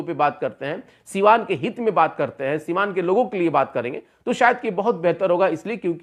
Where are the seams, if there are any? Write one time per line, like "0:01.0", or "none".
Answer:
none